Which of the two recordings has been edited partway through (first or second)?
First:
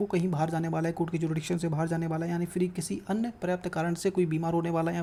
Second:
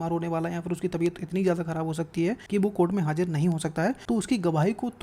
second